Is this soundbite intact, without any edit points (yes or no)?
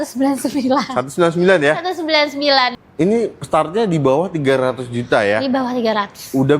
no